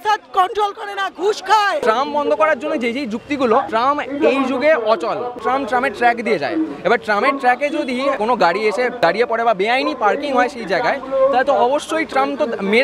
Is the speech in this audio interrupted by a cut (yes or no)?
no